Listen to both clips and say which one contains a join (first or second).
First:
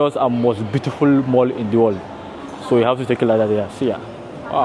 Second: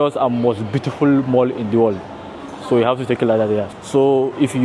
second